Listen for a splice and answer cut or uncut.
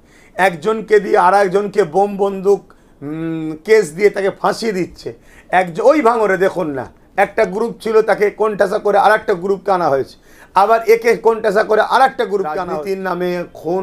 cut